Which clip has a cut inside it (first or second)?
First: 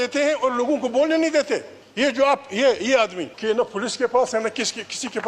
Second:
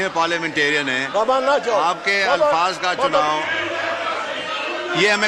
first